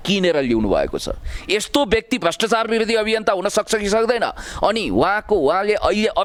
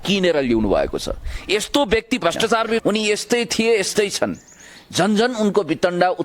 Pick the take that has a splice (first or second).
second